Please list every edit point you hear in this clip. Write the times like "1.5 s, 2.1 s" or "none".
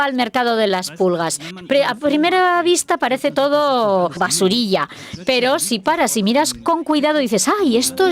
4.2 s